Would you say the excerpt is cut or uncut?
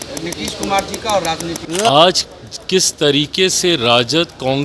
cut